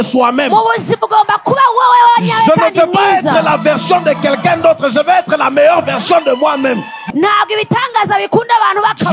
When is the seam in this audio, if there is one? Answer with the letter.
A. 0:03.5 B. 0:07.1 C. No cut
B